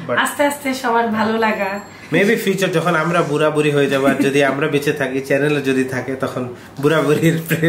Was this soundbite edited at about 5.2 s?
no; 1 cut; at 1.9 s

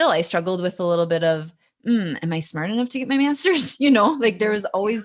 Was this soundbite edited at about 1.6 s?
no; 0 cuts

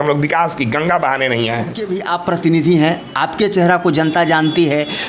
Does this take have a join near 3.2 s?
no; 1 cut; at 2.0 s

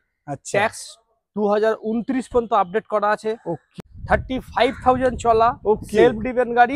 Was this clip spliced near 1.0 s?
no; 1 cut; at 3.7 s

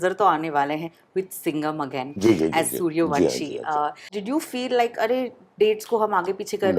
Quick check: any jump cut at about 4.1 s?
yes; 1 cut; at 4.1 s

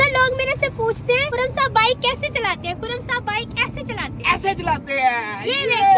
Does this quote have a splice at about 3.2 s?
no; 1 cut; at 1.4 s

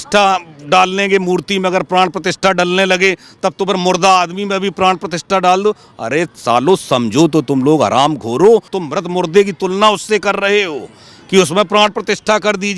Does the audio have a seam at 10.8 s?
no; 1 cut; at 8.8 s

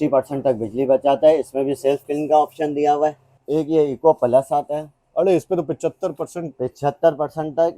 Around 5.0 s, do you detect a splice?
no; 1 cut; at 3.3 s

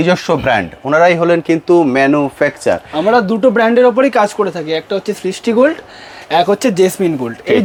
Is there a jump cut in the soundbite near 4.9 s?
no; 0 cuts

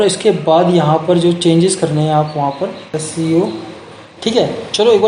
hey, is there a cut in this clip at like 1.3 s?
no; 1 cut; at 2.8 s

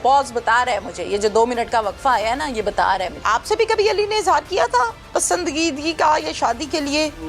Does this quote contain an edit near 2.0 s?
no; 1 cut; at 3.2 s

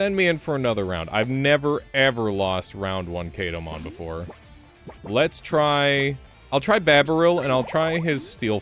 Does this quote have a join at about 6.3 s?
yes; 2 cuts; at 5.0 s, 6.3 s

